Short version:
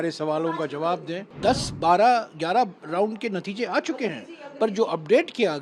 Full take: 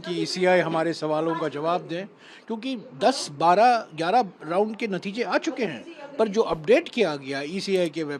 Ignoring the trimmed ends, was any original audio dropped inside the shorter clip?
yes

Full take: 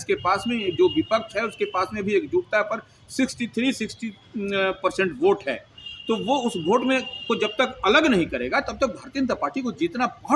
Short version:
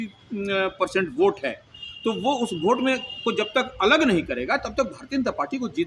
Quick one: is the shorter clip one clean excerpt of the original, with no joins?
yes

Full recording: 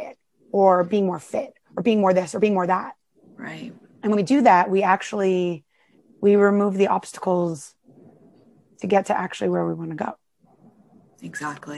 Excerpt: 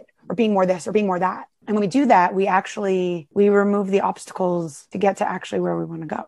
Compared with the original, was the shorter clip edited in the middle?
yes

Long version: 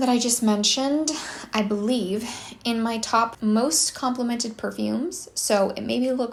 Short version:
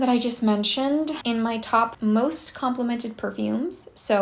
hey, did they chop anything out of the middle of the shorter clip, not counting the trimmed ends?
yes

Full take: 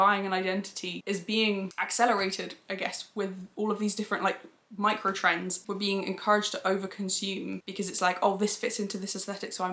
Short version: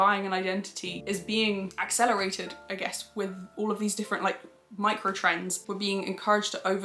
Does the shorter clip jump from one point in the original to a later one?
no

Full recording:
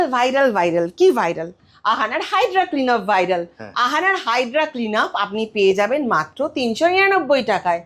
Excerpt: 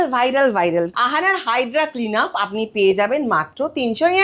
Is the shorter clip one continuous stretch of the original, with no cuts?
no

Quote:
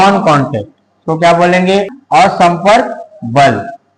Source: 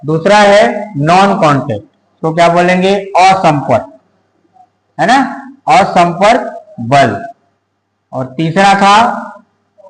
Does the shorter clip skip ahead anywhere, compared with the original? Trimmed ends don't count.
yes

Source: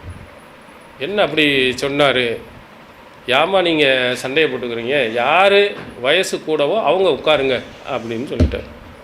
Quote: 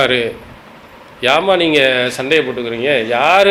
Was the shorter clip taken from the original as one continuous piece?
yes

